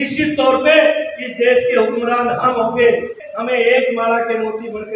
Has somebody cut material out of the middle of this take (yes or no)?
yes